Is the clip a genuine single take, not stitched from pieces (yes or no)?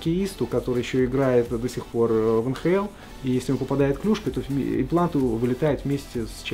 yes